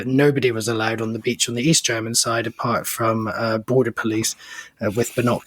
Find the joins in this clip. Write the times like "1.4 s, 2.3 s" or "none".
none